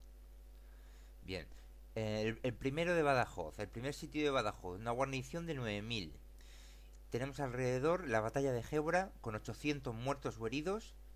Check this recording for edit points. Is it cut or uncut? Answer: uncut